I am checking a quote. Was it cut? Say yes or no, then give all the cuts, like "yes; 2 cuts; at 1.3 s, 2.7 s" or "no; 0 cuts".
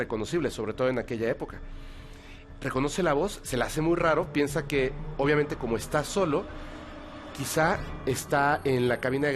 no; 0 cuts